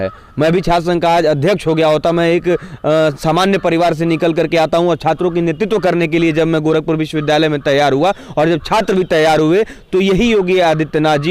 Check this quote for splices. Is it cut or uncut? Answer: uncut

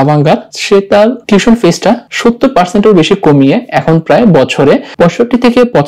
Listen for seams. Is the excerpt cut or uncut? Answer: cut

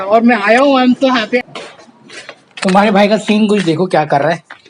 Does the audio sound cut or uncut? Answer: cut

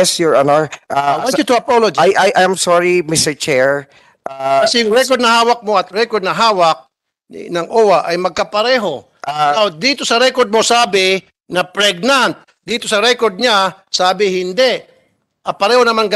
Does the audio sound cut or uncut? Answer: uncut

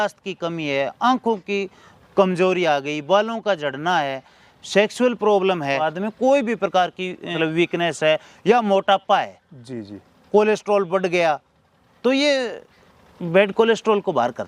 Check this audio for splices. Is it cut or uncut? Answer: cut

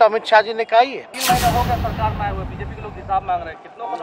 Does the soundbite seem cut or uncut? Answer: cut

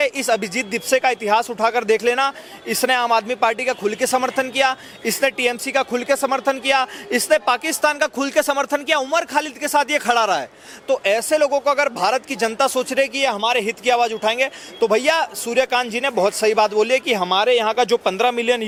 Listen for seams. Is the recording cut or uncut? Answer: uncut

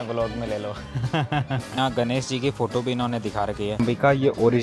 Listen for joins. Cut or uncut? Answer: cut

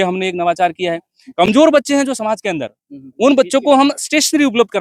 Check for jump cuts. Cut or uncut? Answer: uncut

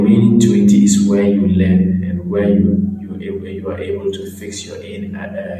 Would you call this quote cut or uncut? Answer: uncut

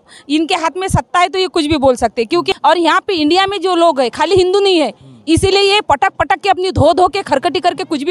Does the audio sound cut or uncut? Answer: cut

